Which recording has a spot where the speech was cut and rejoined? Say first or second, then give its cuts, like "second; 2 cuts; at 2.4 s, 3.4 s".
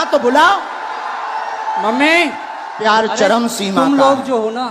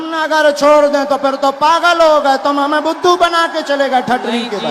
first; 1 cut; at 2.8 s